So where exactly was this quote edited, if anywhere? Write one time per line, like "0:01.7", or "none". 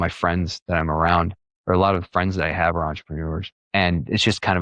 0:03.5